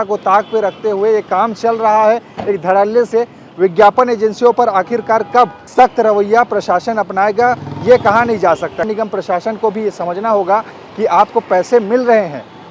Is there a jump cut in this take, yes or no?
yes